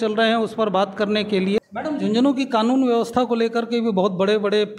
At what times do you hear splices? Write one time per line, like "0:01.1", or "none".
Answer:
0:01.6

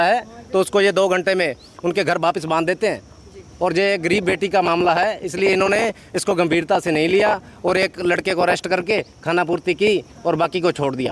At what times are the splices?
none

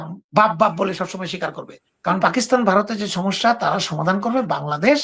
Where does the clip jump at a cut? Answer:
0:02.2

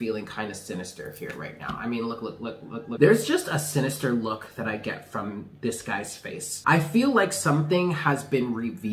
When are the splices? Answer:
0:02.9
0:06.5

